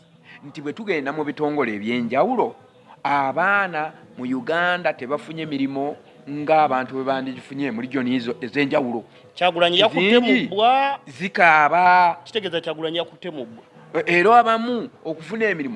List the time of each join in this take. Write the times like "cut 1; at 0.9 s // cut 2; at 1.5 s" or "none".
none